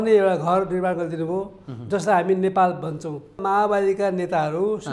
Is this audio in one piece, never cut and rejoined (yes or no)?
no